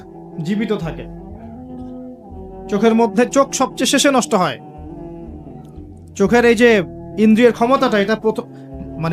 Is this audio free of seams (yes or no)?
yes